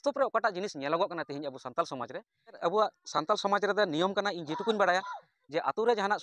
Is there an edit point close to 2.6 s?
yes; 1 cut; at 2.6 s

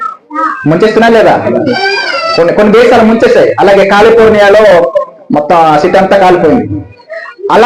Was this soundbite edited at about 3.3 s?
no; 1 cut; at 1.8 s

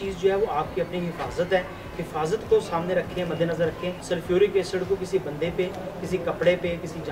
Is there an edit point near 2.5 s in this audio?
no; 1 cut; at 3.9 s

